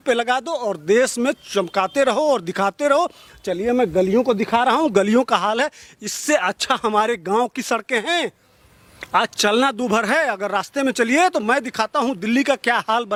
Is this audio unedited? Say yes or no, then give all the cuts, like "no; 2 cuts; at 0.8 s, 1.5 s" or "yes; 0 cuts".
yes; 0 cuts